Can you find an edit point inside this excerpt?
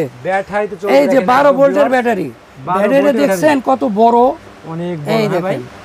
no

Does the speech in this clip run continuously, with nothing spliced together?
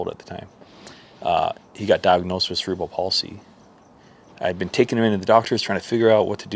yes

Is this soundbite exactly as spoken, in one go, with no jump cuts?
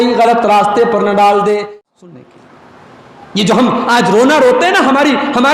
no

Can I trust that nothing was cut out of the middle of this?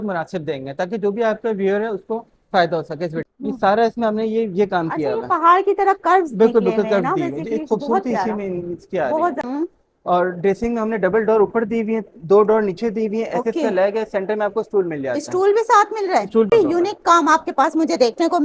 no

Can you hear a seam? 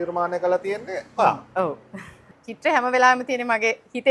no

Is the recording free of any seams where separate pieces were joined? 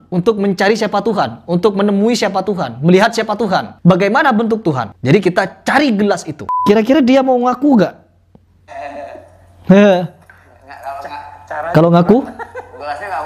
no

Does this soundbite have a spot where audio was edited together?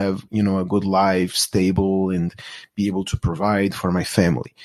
no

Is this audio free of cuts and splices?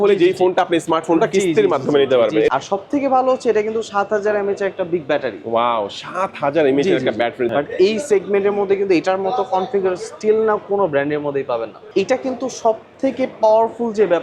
no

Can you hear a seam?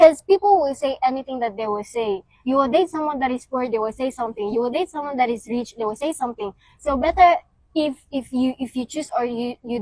no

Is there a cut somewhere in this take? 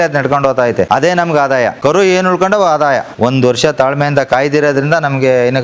yes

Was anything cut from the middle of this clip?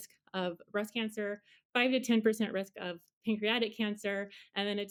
no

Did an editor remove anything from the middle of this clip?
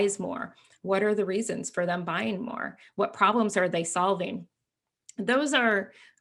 no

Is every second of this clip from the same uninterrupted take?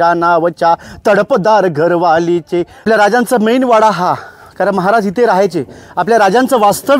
no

